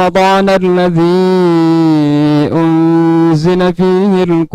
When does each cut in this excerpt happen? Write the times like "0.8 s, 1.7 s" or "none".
none